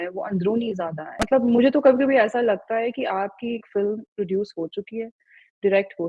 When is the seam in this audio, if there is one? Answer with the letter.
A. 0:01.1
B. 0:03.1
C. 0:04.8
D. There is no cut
A